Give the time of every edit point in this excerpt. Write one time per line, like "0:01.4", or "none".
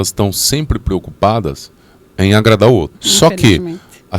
0:03.0